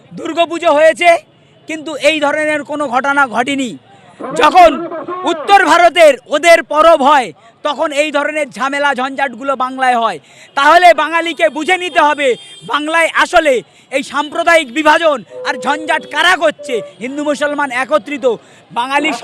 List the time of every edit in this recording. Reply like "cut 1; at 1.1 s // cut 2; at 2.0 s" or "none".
cut 1; at 16.9 s